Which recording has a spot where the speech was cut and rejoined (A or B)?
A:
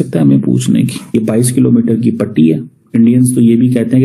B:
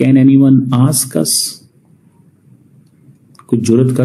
A